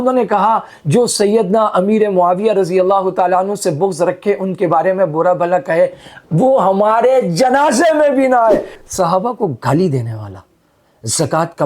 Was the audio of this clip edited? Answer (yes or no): yes